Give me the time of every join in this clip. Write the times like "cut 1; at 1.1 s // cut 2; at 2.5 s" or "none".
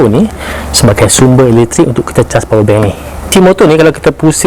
cut 1; at 3.3 s